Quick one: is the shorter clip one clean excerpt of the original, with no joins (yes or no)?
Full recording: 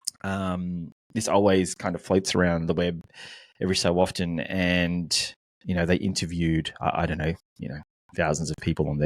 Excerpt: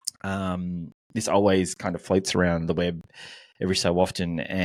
yes